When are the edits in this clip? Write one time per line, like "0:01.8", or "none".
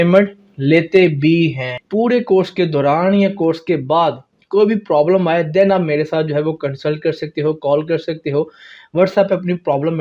0:01.8